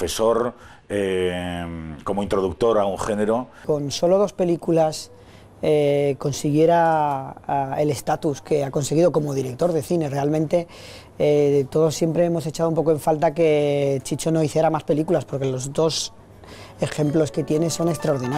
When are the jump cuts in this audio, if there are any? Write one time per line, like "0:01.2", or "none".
0:03.6